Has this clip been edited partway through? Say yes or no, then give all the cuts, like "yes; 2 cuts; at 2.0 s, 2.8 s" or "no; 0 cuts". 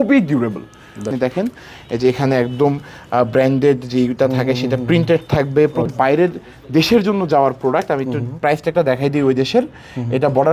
yes; 2 cuts; at 1.1 s, 5.9 s